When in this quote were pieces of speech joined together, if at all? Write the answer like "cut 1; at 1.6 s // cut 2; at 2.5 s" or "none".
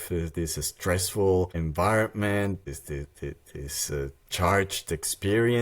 cut 1; at 1.6 s // cut 2; at 2.7 s